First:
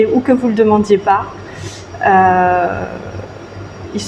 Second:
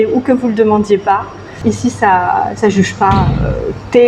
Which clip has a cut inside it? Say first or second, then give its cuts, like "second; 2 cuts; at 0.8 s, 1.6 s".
second; 1 cut; at 1.5 s